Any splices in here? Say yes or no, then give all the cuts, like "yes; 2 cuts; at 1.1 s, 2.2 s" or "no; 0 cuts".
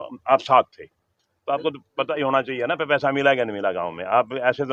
no; 0 cuts